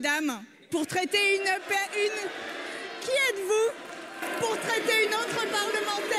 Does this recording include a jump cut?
no; 0 cuts

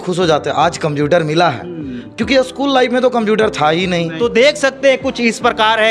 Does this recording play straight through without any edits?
no; 1 cut; at 4.1 s

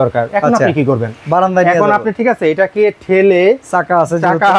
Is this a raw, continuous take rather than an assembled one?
yes; 0 cuts

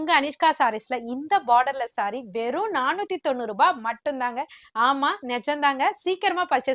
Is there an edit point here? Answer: no; 0 cuts

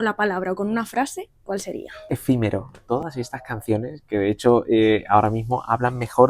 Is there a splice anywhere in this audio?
yes; 2 cuts; at 1.9 s, 2.8 s

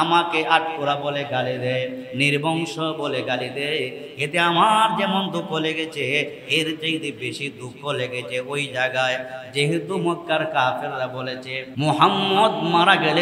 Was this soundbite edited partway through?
yes; 1 cut; at 11.6 s

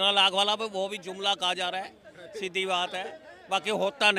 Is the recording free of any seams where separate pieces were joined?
yes; 0 cuts

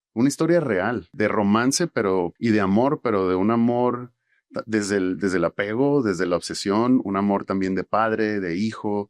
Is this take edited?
yes; 2 cuts; at 1.1 s, 2.3 s

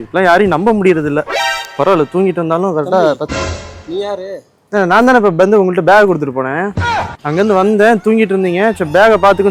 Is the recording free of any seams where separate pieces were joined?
yes; 0 cuts

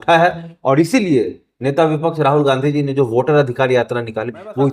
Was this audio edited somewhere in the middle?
no; 0 cuts

